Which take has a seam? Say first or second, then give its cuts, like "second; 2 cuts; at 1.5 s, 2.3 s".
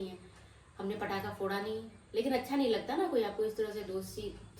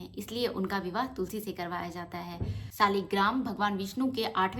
second; 1 cut; at 2.6 s